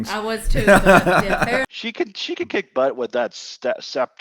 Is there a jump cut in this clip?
yes; 1 cut; at 1.6 s

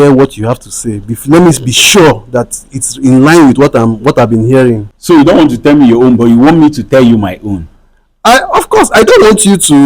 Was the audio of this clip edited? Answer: yes; 1 cut; at 4.9 s

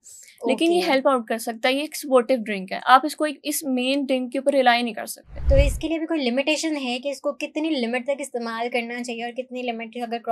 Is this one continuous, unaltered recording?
no; 1 cut; at 5.4 s

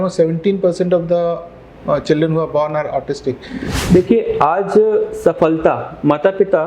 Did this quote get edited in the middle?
yes; 1 cut; at 3.7 s

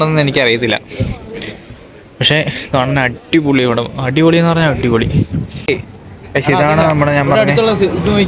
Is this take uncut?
no; 1 cut; at 5.7 s

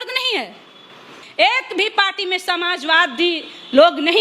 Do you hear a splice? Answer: yes; 1 cut; at 1.1 s

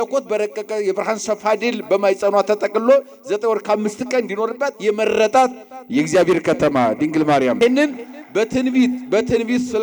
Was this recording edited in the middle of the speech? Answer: yes; 1 cut; at 7.6 s

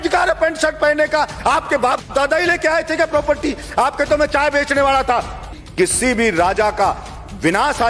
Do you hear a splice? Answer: yes; 1 cut; at 5.6 s

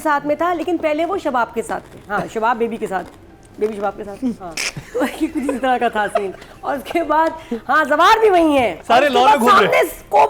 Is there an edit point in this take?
yes; 1 cut; at 8.8 s

